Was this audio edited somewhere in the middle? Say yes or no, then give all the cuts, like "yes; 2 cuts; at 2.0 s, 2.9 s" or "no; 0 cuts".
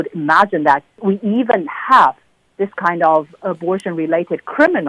yes; 1 cut; at 0.9 s